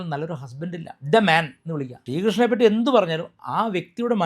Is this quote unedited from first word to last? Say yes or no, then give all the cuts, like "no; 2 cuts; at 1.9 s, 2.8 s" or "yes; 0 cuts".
no; 1 cut; at 1.9 s